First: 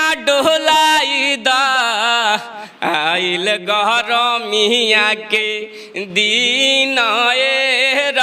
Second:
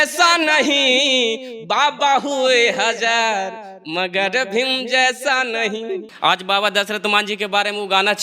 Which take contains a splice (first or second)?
second